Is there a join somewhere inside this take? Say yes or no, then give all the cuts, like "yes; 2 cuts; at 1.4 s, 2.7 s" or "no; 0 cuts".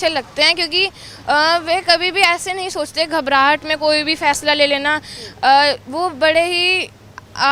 no; 0 cuts